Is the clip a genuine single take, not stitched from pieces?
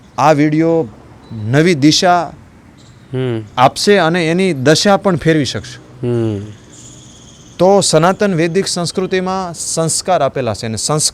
yes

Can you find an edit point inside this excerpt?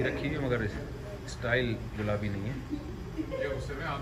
no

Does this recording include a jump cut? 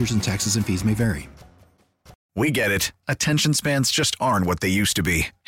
yes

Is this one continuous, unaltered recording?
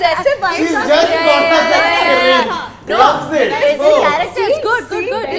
yes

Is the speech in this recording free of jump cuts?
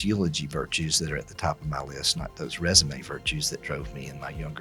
yes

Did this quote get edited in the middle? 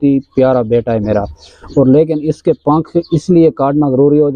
no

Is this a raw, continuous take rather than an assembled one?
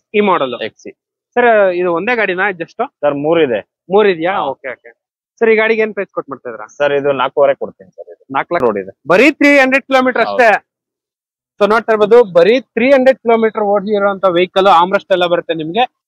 no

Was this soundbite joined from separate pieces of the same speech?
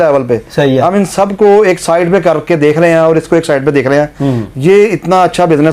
no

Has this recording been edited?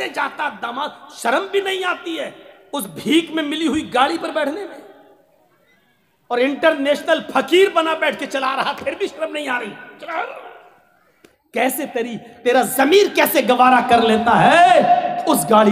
no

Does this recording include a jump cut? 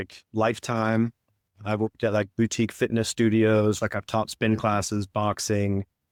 no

